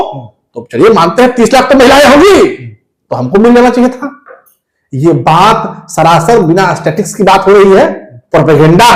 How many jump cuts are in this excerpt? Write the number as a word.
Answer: zero